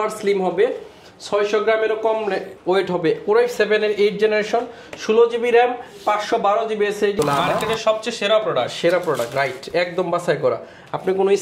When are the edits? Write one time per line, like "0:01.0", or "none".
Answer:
0:07.2